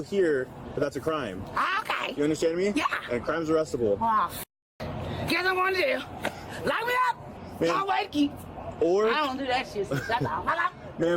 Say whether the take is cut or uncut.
cut